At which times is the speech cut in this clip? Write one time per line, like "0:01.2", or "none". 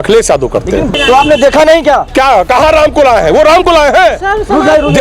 0:00.9